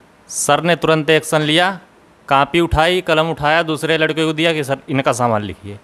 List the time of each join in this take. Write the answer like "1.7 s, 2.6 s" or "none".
none